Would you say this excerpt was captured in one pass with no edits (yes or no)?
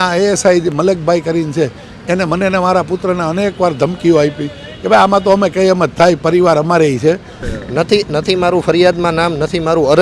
no